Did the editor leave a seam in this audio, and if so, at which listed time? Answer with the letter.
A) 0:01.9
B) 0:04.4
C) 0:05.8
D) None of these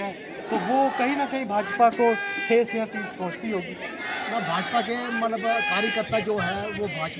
D